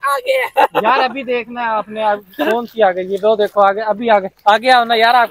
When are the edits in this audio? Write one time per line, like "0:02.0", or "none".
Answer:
none